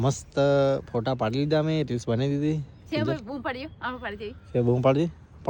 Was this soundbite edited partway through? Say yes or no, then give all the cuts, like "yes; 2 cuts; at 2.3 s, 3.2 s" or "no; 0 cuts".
no; 0 cuts